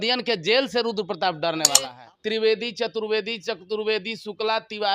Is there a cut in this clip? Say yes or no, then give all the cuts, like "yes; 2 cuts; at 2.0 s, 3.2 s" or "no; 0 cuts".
yes; 1 cut; at 1.9 s